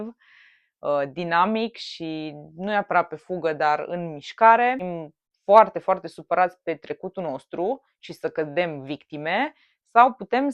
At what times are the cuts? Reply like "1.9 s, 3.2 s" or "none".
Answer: 4.8 s